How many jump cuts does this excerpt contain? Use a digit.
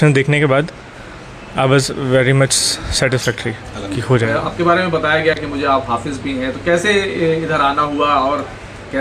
0